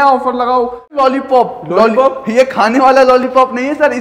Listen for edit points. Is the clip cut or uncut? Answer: cut